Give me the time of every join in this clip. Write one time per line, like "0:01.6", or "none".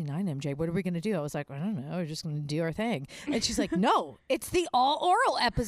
none